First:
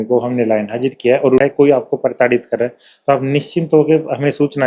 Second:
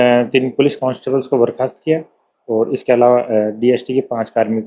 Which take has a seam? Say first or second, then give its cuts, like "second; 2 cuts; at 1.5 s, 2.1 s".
first; 1 cut; at 1.4 s